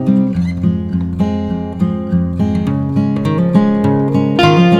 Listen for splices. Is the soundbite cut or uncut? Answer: uncut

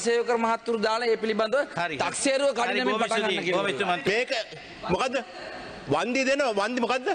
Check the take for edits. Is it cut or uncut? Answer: cut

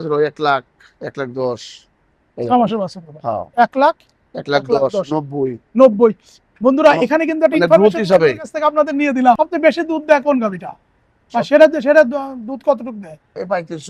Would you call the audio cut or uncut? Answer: cut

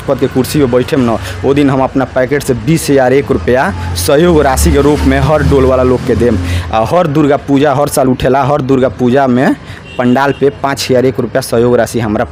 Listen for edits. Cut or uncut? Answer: uncut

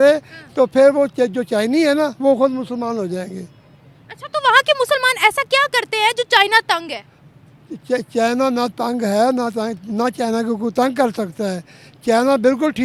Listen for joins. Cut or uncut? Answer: uncut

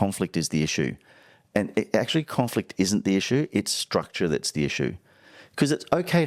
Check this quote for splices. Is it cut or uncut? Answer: uncut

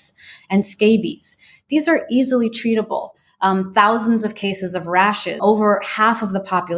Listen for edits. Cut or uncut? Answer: cut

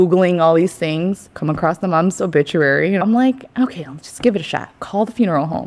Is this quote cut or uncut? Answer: cut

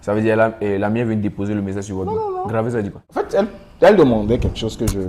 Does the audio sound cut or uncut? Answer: cut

